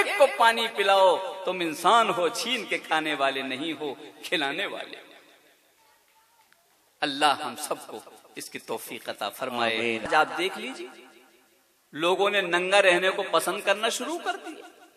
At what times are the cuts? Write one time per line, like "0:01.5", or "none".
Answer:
0:10.1